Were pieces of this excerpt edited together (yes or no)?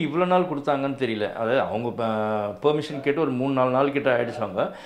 no